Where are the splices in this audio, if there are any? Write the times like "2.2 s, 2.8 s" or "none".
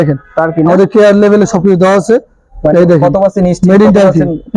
none